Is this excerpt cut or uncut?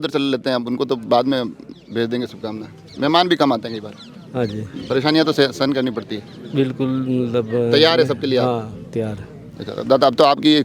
uncut